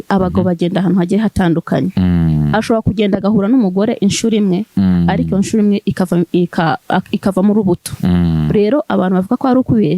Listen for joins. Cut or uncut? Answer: uncut